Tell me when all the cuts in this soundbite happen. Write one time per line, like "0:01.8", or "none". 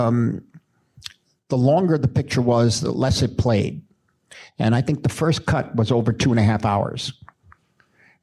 0:01.2